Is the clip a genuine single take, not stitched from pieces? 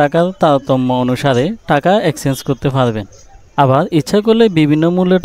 yes; 0 cuts

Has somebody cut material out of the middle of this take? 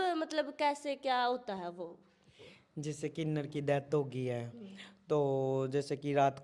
no; 0 cuts

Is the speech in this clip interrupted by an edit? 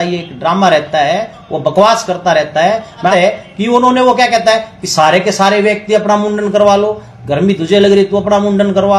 yes; 1 cut; at 3.1 s

